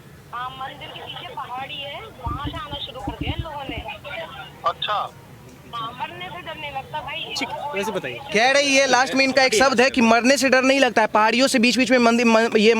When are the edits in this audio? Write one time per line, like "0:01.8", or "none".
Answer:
none